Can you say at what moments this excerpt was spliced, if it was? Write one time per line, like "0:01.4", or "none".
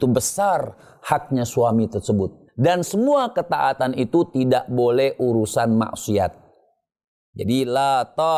0:02.4